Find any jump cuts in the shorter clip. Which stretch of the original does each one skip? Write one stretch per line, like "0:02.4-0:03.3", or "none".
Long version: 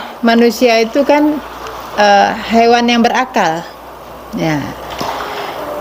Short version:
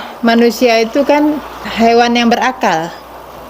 0:01.7-0:02.4